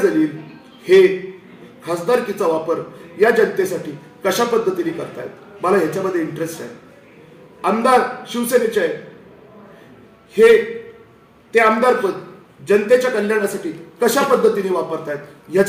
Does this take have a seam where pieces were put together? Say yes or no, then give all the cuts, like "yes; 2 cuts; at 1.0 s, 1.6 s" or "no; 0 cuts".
no; 0 cuts